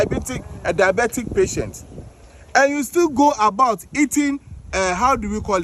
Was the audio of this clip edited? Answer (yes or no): no